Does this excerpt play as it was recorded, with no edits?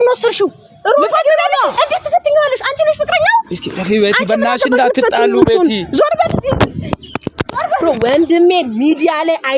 no; 1 cut; at 7.9 s

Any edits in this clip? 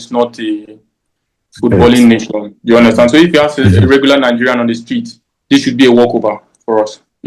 no; 0 cuts

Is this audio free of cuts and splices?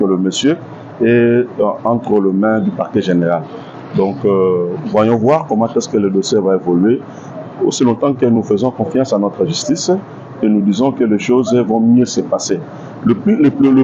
yes; 0 cuts

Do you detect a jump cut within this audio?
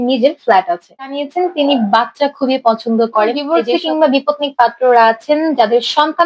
yes; 2 cuts; at 1.2 s, 3.4 s

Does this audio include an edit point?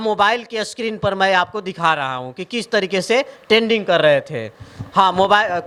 no; 0 cuts

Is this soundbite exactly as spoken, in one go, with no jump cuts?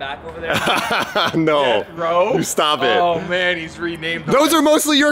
yes; 0 cuts

